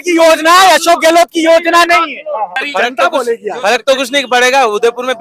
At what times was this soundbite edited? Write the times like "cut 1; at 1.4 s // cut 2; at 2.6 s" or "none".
cut 1; at 2.6 s